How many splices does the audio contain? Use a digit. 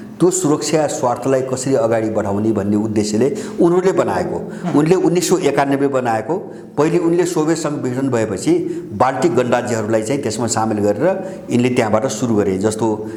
0